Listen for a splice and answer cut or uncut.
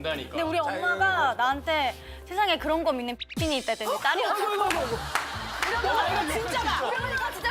uncut